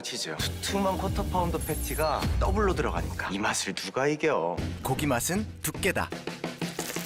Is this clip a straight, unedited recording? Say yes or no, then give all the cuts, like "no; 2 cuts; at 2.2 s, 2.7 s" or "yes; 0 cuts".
yes; 0 cuts